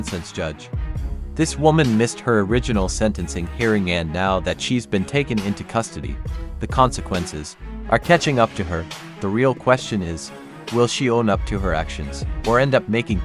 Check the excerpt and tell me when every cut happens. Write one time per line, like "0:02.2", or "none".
none